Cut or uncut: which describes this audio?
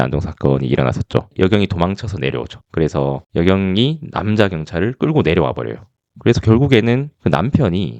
cut